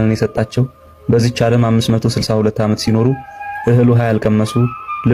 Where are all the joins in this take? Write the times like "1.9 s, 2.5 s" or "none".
none